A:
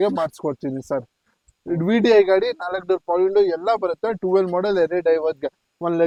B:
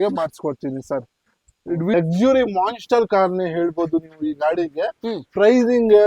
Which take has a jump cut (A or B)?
B